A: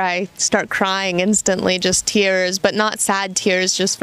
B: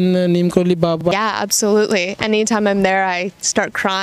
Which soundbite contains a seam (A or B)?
B